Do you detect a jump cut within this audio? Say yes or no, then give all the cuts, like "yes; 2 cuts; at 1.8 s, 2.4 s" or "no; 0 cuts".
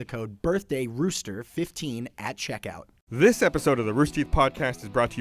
yes; 1 cut; at 2.9 s